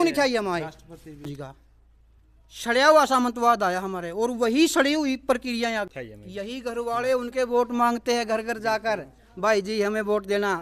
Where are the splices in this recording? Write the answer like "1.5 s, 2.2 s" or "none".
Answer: 1.3 s, 5.9 s